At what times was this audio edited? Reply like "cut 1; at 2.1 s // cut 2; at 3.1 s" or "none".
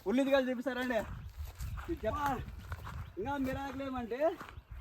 cut 1; at 2.1 s